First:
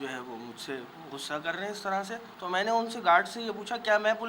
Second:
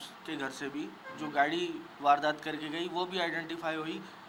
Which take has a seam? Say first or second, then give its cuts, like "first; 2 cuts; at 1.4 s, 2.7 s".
first; 1 cut; at 2.3 s